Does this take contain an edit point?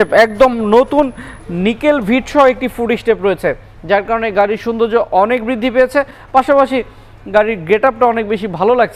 no; 0 cuts

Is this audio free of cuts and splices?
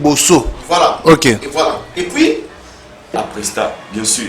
no; 1 cut; at 3.1 s

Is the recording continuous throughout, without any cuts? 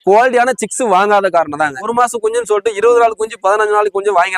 no; 1 cut; at 1.9 s

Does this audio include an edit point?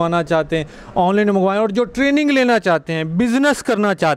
no; 0 cuts

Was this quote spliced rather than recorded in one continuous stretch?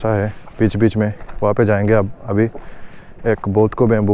no; 0 cuts

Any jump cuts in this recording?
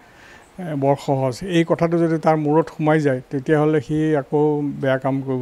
no; 0 cuts

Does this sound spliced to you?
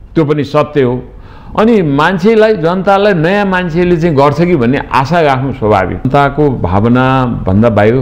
yes; 1 cut; at 6.1 s

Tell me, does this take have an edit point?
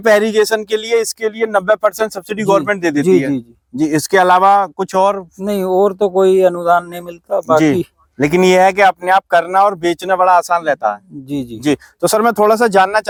no; 0 cuts

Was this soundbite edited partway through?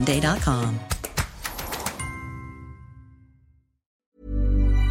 yes; 1 cut; at 3.9 s

